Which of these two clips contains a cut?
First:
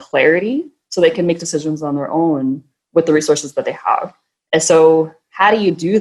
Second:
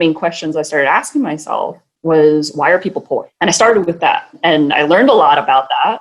second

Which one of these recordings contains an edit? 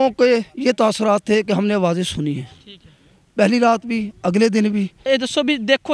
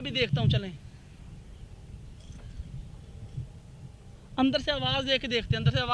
first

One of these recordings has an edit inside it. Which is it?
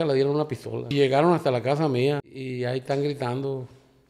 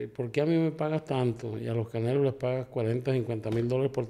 first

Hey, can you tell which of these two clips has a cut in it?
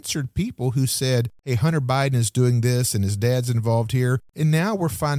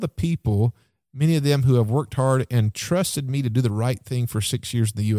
first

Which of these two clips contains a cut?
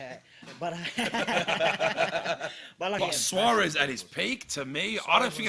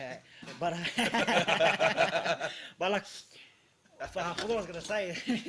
first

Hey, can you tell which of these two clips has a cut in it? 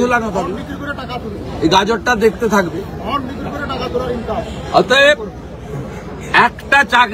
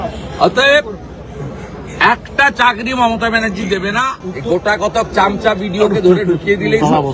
second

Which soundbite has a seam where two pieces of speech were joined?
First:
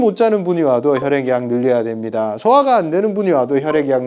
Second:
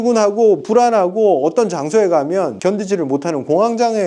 second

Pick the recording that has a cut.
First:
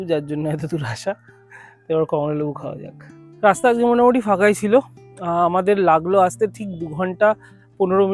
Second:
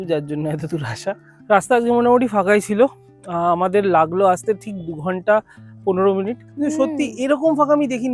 second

